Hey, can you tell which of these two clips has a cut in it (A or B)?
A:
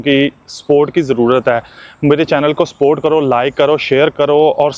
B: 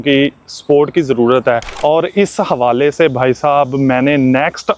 B